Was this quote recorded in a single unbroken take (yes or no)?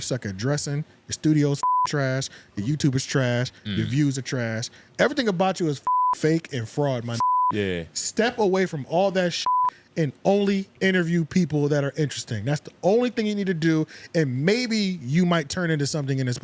yes